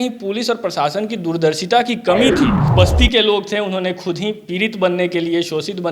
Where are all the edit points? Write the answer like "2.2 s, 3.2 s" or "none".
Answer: 2.6 s